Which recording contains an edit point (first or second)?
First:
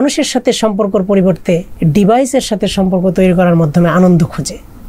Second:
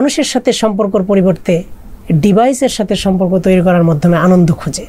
first